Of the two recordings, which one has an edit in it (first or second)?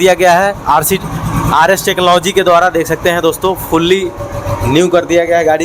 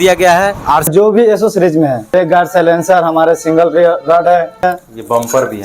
second